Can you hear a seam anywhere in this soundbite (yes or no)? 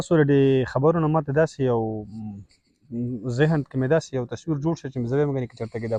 no